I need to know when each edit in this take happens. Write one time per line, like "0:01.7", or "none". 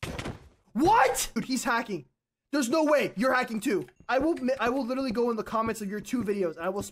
0:01.4
0:04.0